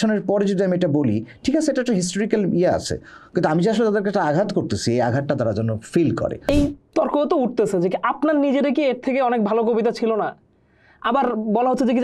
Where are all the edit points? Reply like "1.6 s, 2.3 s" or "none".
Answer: 6.4 s

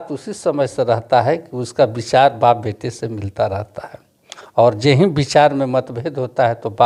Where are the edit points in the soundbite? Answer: none

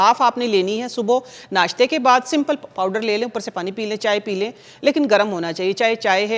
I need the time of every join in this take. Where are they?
none

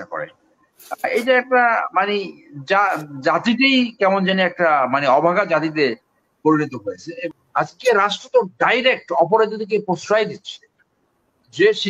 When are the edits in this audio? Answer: 7.1 s

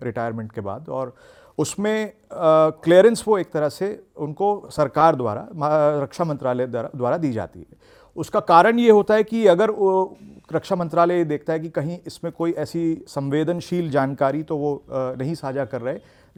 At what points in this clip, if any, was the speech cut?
none

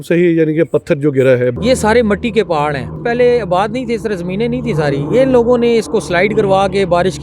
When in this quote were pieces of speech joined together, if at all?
1.6 s, 3.0 s

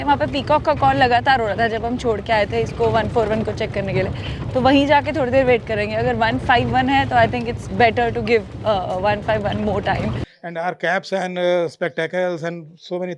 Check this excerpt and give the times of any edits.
10.3 s

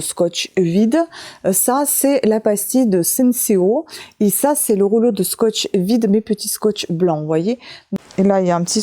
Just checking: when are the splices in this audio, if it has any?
7.8 s

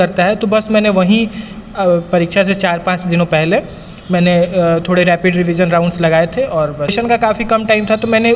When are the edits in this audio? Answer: 7.0 s

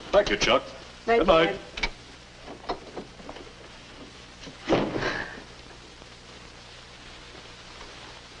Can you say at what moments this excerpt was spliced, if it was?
none

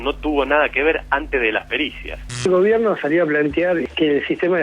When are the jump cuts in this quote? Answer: 2.2 s

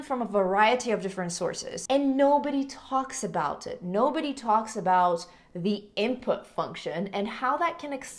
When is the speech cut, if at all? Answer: 1.7 s

